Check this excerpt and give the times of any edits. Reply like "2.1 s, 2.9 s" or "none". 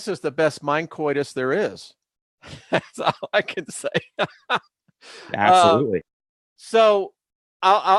none